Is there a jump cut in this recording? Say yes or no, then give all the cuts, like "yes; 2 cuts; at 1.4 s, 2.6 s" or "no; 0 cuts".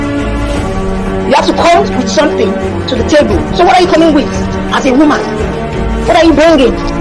yes; 1 cut; at 1.2 s